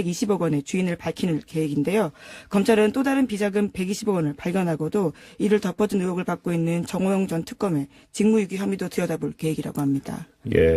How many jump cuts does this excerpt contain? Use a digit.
1